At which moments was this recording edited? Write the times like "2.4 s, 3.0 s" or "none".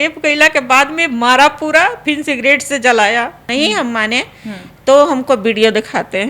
3.5 s